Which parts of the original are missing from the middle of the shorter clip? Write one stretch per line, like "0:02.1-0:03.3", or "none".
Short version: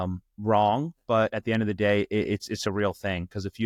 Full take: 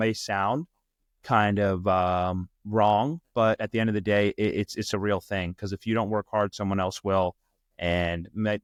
none